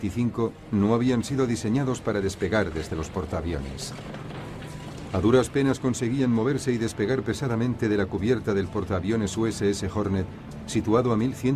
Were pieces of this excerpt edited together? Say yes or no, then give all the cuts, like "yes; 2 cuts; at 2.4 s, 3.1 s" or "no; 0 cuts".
yes; 1 cut; at 3.1 s